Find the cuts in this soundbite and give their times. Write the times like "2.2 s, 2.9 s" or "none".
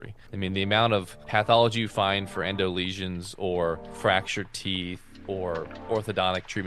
3.9 s, 5.3 s